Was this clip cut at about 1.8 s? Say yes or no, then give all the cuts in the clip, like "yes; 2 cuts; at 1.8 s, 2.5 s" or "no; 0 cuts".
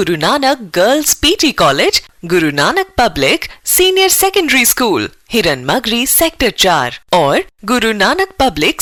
no; 0 cuts